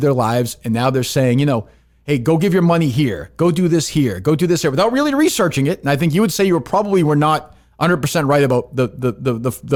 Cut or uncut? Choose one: uncut